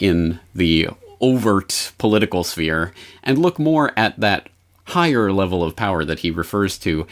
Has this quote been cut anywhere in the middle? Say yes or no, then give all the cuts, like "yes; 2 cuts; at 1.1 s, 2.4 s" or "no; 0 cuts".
yes; 1 cut; at 2.5 s